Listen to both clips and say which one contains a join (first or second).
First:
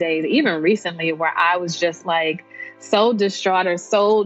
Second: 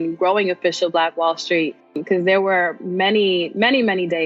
second